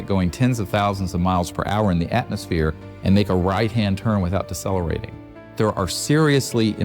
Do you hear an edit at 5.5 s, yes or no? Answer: yes